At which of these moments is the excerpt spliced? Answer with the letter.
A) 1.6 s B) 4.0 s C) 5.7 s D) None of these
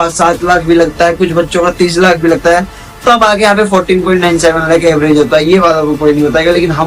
D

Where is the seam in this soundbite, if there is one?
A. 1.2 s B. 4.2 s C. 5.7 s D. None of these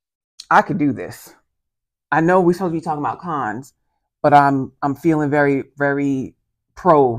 D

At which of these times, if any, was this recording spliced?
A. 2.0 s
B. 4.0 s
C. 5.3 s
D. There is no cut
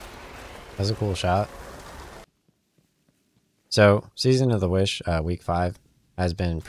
A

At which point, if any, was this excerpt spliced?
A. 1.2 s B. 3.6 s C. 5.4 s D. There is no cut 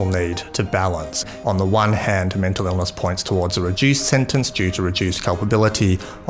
A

